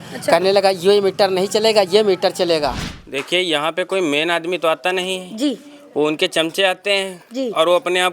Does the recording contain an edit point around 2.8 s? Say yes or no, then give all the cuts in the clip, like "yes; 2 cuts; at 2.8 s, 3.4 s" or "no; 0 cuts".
yes; 1 cut; at 2.8 s